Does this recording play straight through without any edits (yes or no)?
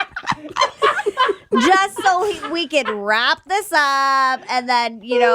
yes